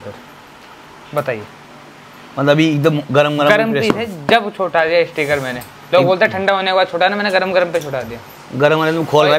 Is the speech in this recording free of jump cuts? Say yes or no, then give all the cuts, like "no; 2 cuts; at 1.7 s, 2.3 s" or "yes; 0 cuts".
yes; 0 cuts